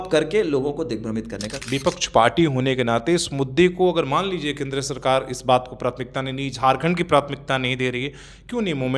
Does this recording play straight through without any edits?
no; 1 cut; at 1.5 s

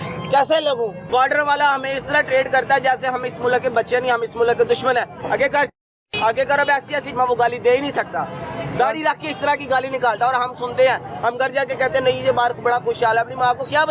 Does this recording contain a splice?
yes; 2 cuts; at 1.0 s, 7.1 s

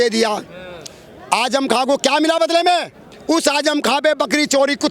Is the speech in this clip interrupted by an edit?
yes; 1 cut; at 3.1 s

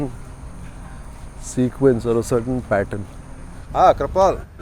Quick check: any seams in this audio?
yes; 1 cut; at 3.6 s

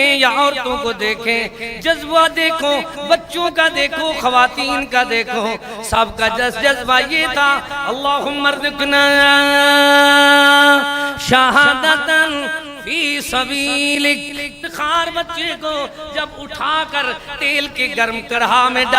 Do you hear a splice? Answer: yes; 1 cut; at 14.7 s

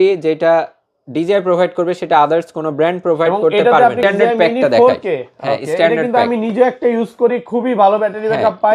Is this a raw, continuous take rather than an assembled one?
no; 1 cut; at 4.0 s

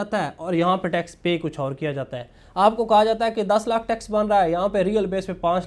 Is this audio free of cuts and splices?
yes; 0 cuts

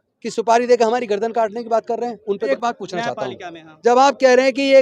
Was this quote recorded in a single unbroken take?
no; 1 cut; at 2.5 s

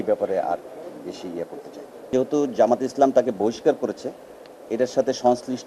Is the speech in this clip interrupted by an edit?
yes; 1 cut; at 2.1 s

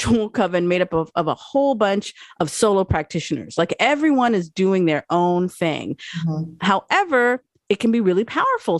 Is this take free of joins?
yes; 0 cuts

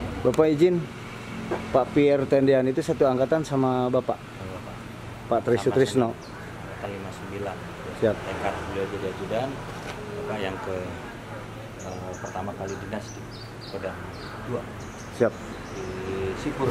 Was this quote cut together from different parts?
no; 0 cuts

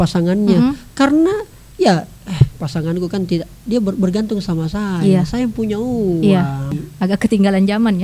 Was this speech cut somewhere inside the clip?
yes; 1 cut; at 6.7 s

